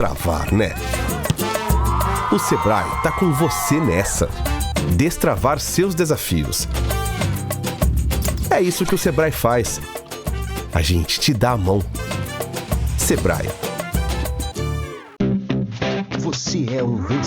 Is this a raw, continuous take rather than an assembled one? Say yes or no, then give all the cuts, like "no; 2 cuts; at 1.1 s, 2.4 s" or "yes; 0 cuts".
no; 1 cut; at 15.0 s